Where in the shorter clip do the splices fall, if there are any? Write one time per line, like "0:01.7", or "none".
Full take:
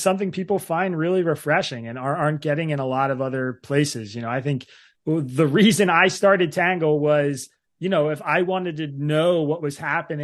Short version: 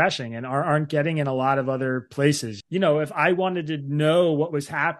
0:02.5